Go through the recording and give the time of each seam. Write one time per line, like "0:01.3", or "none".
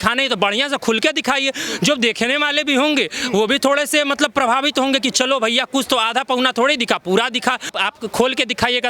0:07.7